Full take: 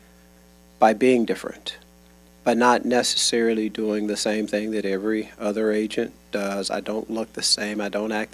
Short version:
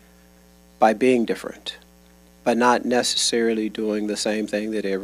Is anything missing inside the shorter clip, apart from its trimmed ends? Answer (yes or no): no